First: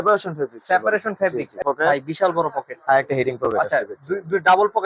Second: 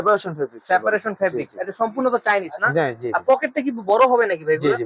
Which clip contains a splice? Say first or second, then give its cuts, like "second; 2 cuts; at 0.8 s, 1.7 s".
first; 1 cut; at 1.6 s